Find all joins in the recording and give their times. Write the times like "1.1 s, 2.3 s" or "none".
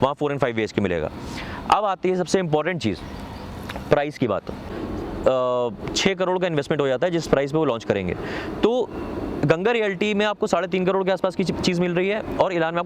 4.7 s